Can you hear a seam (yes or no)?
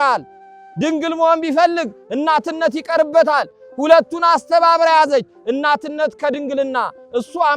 no